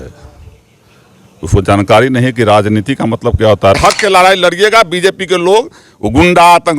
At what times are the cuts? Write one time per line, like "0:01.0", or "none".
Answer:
0:03.8